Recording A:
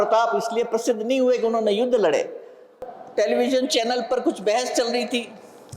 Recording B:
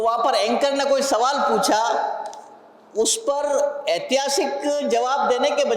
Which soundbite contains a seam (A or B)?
A